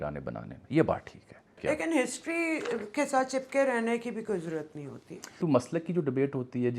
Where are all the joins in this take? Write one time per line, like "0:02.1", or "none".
0:01.6
0:05.4

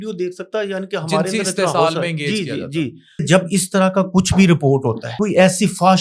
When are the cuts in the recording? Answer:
0:03.2
0:05.1

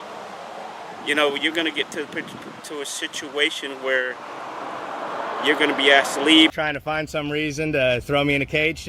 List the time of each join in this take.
0:06.5

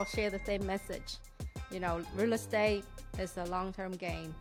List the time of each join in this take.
none

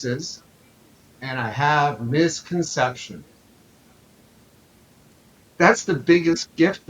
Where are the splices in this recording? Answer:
0:05.4

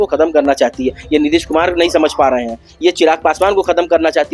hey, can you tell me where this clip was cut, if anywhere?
none

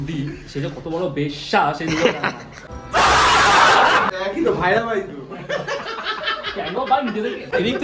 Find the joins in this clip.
none

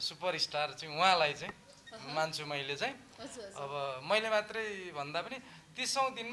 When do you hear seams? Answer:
none

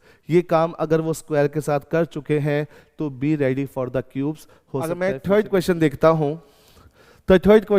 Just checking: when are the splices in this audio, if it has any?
0:04.9

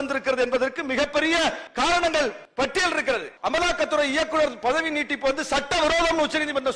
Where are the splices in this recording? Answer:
0:01.7
0:02.4
0:03.3

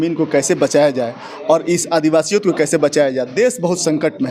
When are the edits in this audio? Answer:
none

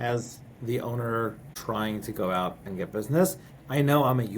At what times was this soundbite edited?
0:01.5

